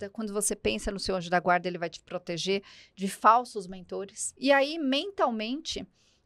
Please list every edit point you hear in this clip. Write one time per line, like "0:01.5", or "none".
0:04.3